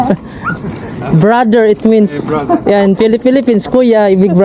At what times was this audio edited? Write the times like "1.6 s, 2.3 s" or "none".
none

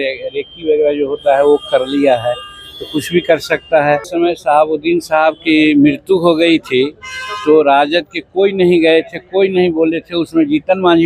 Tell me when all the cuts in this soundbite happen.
4.1 s

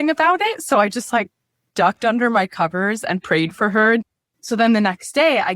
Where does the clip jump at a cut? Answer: 4.1 s

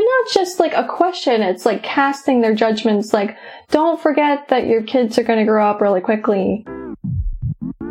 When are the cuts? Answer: 6.6 s

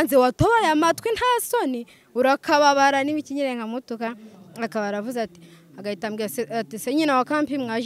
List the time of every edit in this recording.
none

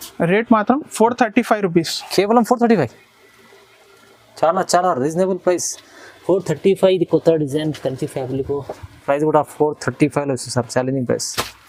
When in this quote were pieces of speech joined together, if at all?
none

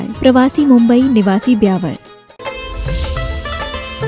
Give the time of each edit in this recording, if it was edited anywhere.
2.3 s

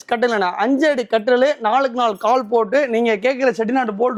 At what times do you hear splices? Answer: none

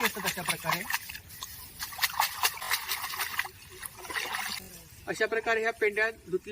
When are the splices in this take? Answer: 2.6 s, 4.6 s

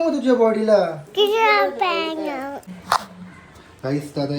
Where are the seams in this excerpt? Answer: 2.5 s

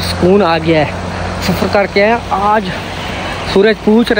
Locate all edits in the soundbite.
none

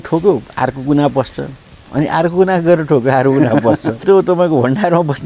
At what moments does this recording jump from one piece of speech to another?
4.0 s

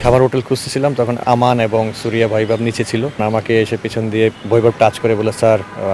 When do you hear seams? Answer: 1.2 s, 3.2 s, 4.4 s

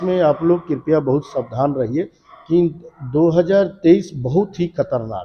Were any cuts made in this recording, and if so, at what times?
none

